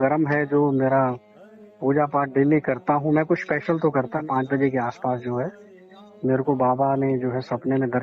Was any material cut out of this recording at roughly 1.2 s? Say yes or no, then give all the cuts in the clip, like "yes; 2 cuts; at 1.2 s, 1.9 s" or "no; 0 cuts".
no; 1 cut; at 4.2 s